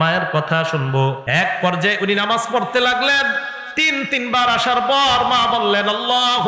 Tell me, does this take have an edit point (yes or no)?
yes